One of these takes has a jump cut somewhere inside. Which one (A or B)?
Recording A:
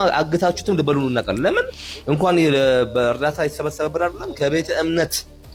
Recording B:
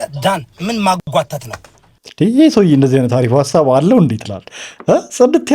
B